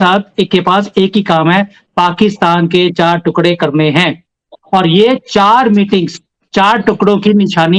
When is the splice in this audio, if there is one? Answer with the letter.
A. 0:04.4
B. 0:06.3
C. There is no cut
C